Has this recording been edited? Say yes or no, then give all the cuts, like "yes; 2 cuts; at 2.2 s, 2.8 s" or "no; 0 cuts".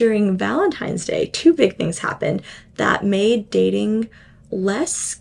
no; 0 cuts